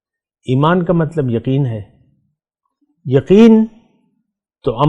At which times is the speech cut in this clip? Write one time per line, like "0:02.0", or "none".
none